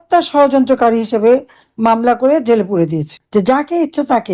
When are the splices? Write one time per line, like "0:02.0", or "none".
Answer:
0:03.1